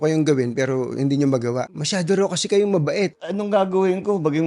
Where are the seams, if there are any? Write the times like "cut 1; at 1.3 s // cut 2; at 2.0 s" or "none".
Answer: cut 1; at 1.7 s // cut 2; at 3.2 s